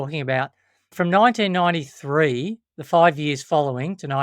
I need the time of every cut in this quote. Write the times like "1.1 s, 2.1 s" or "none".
0.9 s